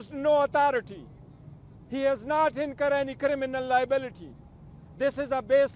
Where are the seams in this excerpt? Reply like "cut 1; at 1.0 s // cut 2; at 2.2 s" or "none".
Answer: none